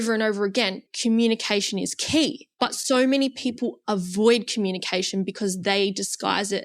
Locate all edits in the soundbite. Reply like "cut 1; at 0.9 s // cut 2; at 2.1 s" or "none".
cut 1; at 0.9 s // cut 2; at 2.4 s